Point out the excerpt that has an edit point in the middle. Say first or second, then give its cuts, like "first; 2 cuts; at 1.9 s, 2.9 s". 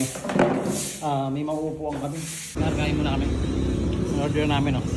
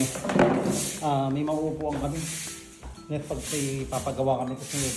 first; 1 cut; at 2.4 s